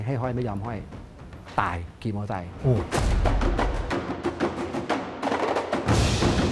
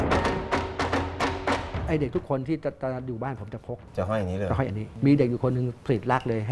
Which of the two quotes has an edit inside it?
second; 3 cuts; at 1.8 s, 3.8 s, 4.9 s

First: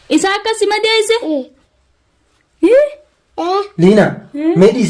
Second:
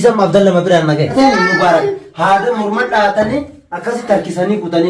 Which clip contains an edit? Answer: second; 1 cut; at 1.1 s

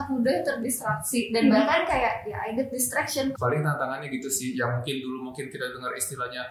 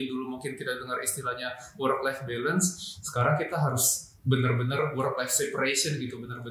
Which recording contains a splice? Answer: first; 1 cut; at 3.3 s

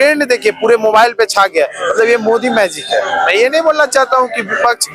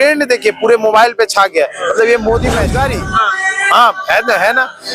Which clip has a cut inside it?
second; 1 cut; at 2.8 s

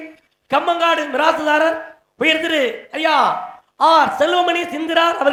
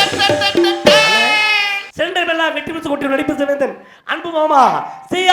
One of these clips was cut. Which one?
second; 1 cut; at 1.8 s

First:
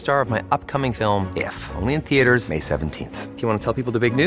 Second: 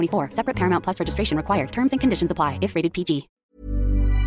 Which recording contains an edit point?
second; 1 cut; at 3.3 s

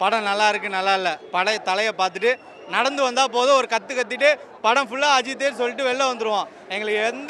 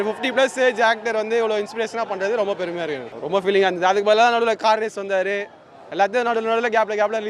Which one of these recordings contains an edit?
second; 1 cut; at 3.1 s

